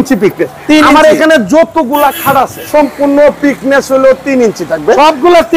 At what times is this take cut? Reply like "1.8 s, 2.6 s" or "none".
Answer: 2.6 s